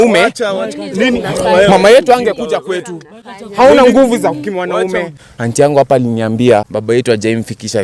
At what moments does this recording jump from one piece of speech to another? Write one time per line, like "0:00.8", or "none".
0:05.2
0:06.7